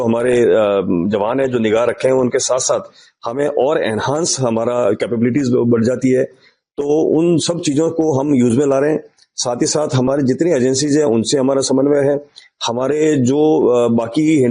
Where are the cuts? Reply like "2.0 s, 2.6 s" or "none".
none

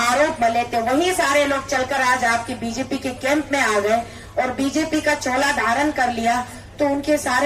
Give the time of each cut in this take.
none

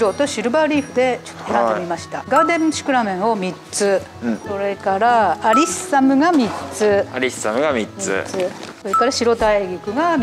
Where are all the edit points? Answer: none

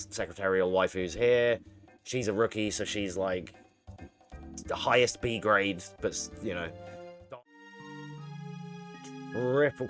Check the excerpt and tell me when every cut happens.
7.1 s

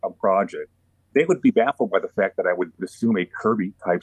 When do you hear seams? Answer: 0.9 s

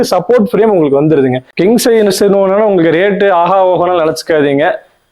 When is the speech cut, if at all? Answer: 1.4 s

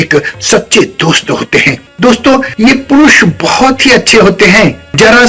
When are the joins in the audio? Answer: 1.8 s, 2.5 s

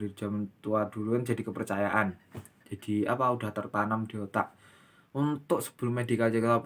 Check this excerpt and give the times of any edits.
none

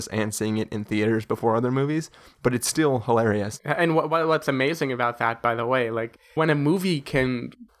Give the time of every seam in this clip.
3.6 s, 6.3 s

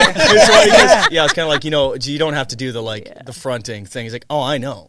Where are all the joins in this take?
1.0 s

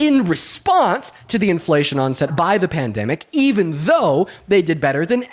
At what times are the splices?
2.3 s

